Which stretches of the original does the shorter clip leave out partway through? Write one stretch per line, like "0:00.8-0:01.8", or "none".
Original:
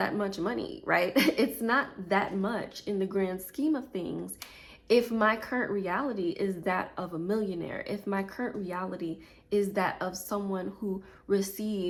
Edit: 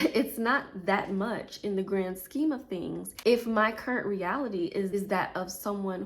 0:04.3-0:04.7
0:06.6-0:09.6